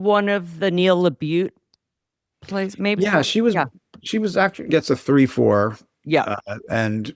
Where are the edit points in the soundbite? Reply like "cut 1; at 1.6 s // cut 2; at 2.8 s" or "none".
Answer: none